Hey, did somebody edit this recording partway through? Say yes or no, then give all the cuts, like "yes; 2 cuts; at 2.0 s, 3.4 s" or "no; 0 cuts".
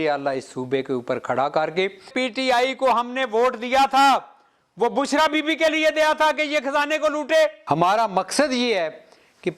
yes; 2 cuts; at 2.1 s, 7.6 s